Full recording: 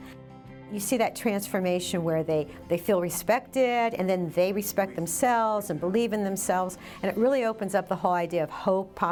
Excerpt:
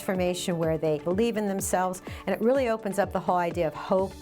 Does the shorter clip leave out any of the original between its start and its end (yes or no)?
yes